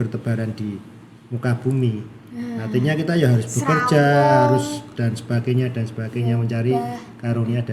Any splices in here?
no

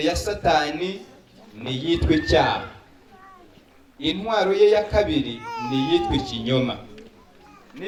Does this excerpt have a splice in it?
no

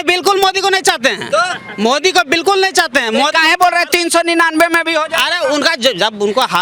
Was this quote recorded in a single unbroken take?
yes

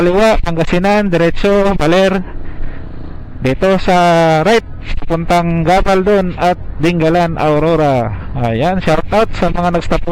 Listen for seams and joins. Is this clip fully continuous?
yes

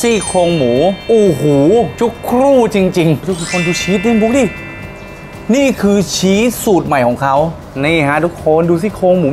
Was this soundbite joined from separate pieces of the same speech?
yes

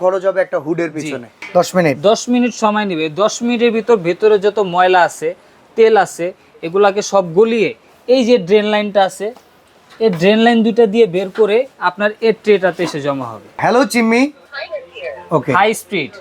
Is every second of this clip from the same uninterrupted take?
no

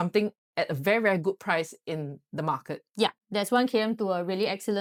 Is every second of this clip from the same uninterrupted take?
yes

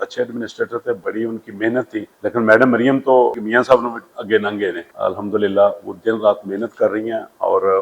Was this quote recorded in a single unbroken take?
no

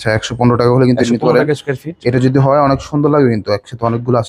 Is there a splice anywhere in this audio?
no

